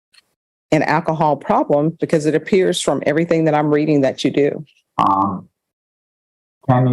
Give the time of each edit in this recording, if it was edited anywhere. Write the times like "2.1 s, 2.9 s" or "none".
4.7 s